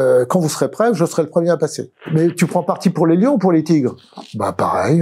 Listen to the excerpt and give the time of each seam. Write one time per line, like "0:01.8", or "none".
0:02.1